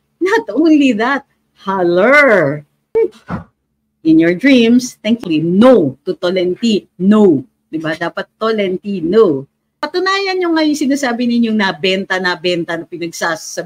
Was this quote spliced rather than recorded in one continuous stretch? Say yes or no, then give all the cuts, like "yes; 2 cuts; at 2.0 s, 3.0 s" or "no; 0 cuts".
yes; 2 cuts; at 2.7 s, 9.8 s